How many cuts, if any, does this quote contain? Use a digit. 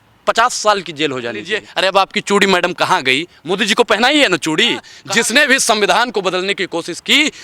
2